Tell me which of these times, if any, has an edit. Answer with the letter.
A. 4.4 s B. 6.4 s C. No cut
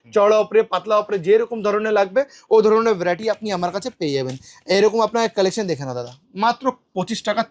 C